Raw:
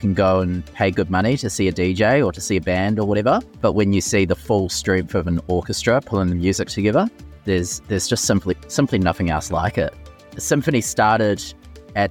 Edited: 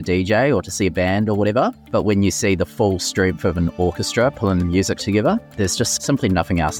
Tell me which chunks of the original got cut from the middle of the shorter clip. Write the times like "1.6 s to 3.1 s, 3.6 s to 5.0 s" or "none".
7.5 s to 8.5 s

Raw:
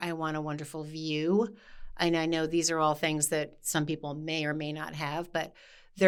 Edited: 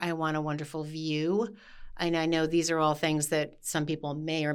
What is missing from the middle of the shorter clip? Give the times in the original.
none

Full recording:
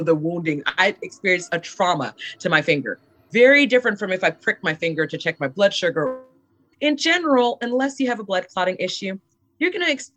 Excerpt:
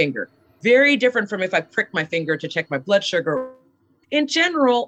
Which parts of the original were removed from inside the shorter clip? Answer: none

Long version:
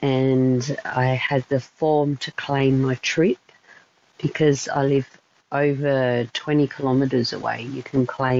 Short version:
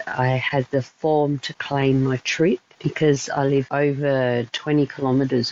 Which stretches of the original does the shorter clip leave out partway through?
3.6 s to 4.2 s, 5.1 s to 5.5 s

